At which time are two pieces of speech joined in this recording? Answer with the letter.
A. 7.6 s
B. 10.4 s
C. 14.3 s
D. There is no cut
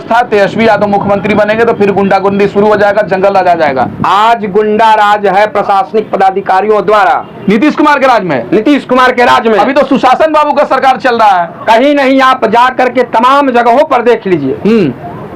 D